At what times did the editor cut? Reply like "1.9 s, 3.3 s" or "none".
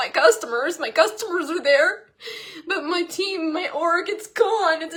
none